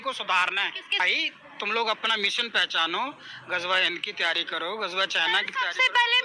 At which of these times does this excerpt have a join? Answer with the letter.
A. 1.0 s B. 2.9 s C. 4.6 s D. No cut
A